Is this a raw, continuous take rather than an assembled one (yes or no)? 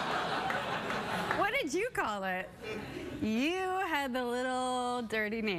yes